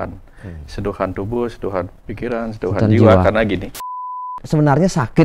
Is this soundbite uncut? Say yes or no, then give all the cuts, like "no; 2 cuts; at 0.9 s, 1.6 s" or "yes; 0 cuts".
no; 1 cut; at 4.3 s